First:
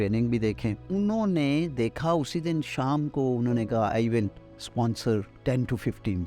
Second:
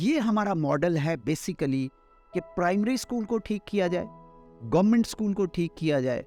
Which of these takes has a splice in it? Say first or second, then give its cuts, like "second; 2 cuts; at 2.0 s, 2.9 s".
first; 2 cuts; at 0.8 s, 5.3 s